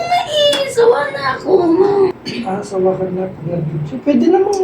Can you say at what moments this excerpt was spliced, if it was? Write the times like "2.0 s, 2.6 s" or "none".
2.1 s